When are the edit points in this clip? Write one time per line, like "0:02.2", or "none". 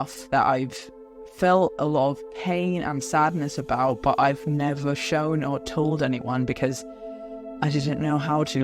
none